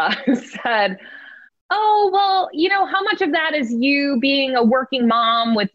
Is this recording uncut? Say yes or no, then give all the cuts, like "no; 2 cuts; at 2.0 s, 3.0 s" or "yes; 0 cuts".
yes; 0 cuts